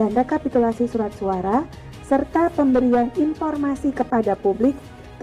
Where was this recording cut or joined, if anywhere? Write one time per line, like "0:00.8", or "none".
none